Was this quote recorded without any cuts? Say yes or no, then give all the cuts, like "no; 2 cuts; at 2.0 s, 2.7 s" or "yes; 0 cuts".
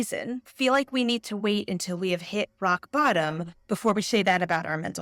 yes; 0 cuts